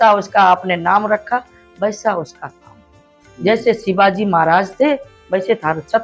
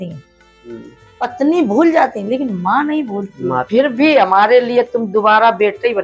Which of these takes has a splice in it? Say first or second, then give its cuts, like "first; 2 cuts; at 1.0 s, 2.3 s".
second; 1 cut; at 3.7 s